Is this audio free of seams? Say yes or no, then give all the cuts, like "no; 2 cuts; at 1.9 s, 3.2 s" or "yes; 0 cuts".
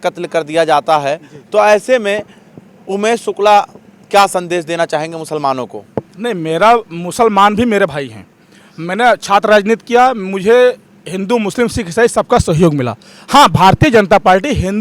yes; 0 cuts